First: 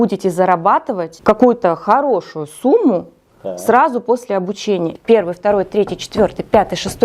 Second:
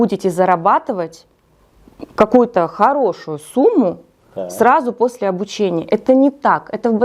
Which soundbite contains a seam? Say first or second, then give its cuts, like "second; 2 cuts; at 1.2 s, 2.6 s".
first; 2 cuts; at 1.1 s, 4.9 s